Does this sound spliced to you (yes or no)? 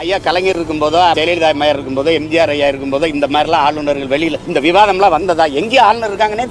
yes